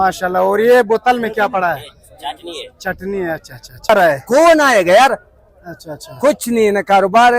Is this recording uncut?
no; 1 cut; at 3.9 s

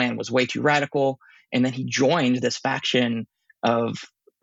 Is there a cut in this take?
no; 0 cuts

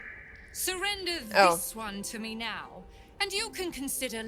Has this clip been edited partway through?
no; 0 cuts

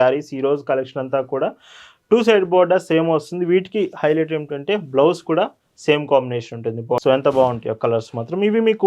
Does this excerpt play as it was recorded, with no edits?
no; 1 cut; at 7.0 s

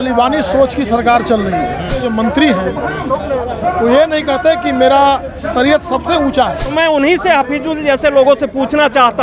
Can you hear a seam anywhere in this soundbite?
yes; 2 cuts; at 2.0 s, 6.6 s

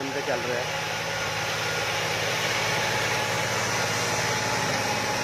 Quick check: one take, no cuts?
yes; 0 cuts

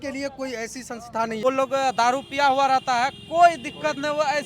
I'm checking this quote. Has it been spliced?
yes; 1 cut; at 1.4 s

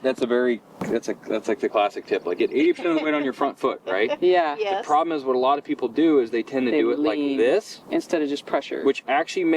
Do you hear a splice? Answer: no; 0 cuts

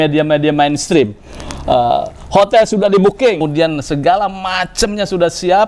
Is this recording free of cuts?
no; 1 cut; at 3.4 s

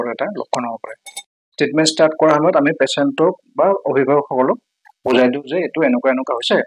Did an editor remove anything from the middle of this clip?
yes; 1 cut; at 1.3 s

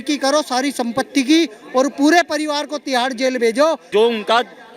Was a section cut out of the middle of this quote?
yes; 1 cut; at 3.8 s

